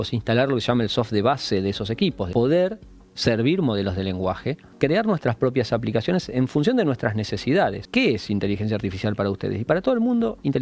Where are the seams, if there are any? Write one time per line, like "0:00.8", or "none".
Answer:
0:02.3
0:04.7
0:07.8